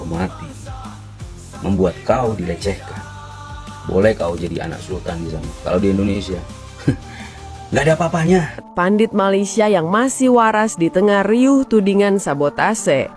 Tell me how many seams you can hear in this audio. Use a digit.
1